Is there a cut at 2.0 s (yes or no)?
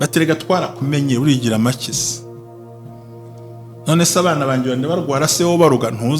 yes